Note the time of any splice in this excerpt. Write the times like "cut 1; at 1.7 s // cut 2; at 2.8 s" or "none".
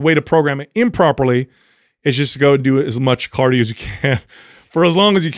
none